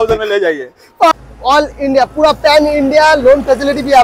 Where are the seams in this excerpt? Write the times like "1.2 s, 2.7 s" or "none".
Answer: 1.1 s